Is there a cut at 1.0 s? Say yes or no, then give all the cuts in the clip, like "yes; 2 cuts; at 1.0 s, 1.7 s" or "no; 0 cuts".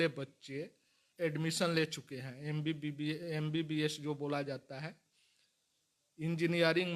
yes; 1 cut; at 1.0 s